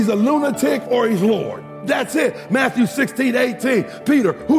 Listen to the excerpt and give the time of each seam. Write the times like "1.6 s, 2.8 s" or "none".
1.8 s

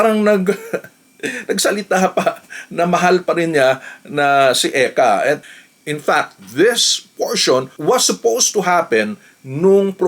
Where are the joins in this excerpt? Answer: 5.4 s

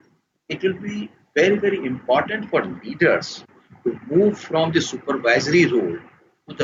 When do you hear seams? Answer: none

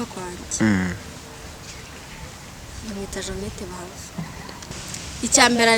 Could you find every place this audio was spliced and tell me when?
4.6 s

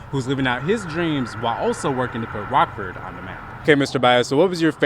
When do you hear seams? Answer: 3.6 s

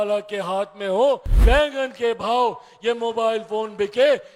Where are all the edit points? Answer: 1.3 s

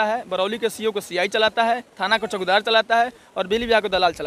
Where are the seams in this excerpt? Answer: none

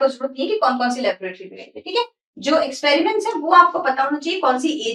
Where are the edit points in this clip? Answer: none

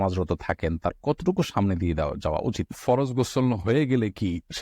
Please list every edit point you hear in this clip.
2.7 s

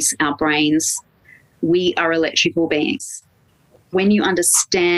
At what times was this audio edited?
3.0 s

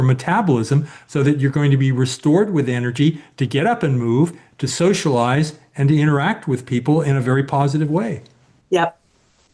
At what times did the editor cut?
none

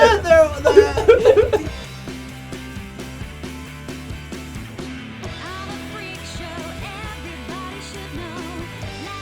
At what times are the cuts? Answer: 1.6 s

